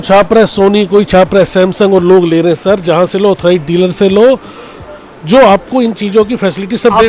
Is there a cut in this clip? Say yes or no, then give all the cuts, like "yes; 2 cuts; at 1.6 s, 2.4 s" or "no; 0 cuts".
no; 0 cuts